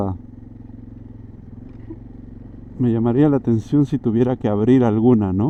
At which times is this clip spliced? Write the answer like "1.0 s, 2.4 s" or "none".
none

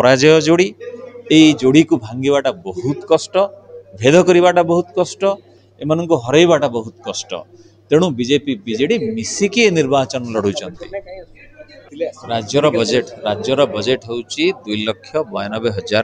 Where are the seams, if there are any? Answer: 11.9 s

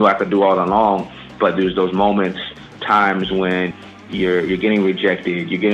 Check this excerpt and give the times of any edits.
1.3 s, 2.8 s, 3.9 s

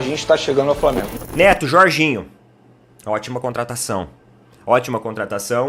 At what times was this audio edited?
1.1 s

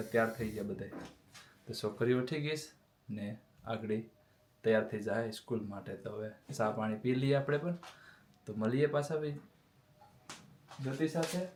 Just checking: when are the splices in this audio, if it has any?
none

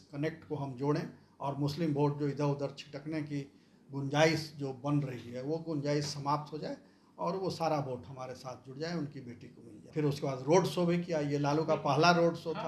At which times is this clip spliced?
9.9 s

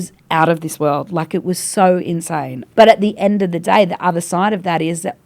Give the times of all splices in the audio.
2.6 s

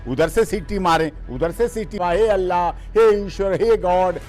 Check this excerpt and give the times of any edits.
2.0 s

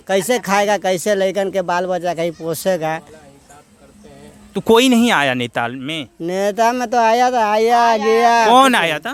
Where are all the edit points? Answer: none

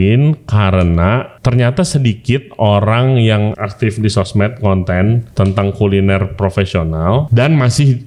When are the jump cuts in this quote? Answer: 1.3 s, 3.5 s, 5.3 s, 7.2 s

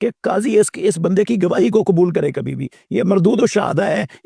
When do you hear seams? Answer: none

